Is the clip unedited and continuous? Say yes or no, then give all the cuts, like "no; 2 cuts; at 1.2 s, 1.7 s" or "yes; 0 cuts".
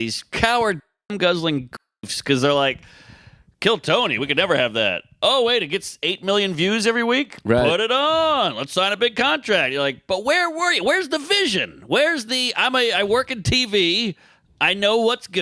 yes; 0 cuts